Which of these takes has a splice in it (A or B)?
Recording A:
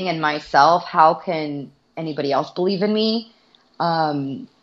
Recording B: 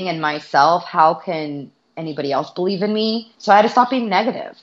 B